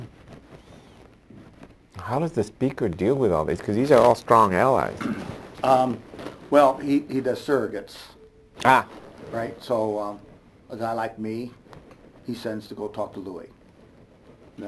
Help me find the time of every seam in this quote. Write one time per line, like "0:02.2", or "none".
0:05.4